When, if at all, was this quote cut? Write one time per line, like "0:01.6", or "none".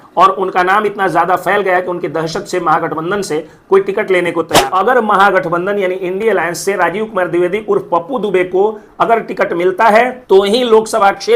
0:04.6

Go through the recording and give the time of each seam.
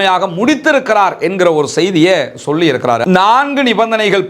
0:03.0

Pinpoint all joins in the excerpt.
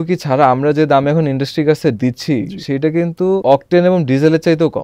0:03.4

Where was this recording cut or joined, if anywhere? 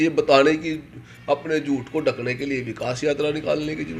none

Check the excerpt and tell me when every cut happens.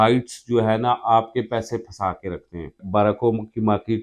0:02.8

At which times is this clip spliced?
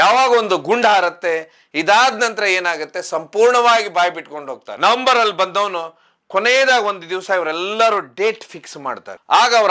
0:04.6

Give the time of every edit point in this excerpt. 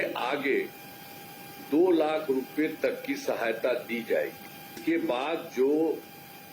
0:04.8

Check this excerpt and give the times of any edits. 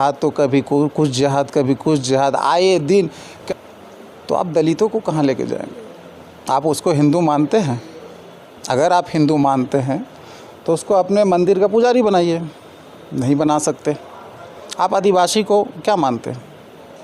0:03.3

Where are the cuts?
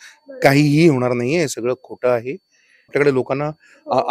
0:02.9

